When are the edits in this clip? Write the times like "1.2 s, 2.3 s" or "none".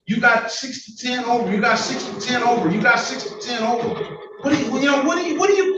none